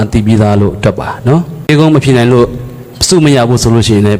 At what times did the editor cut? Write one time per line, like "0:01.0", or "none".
0:01.7